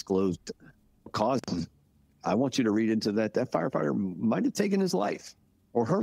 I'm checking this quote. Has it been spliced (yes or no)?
yes